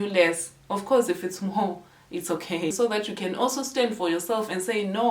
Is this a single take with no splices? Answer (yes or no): no